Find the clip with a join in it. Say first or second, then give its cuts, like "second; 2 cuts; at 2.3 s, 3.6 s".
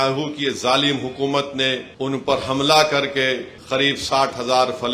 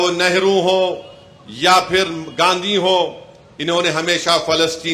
first; 2 cuts; at 1.9 s, 3.5 s